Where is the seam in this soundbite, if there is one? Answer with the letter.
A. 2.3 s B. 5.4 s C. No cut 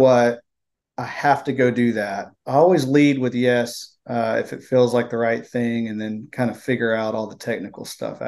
A